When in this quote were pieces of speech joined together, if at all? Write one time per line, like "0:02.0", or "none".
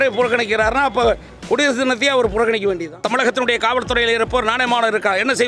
0:03.0